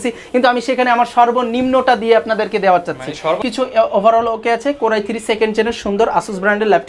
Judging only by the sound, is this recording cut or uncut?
cut